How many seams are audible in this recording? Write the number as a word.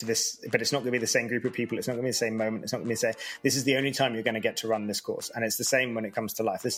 zero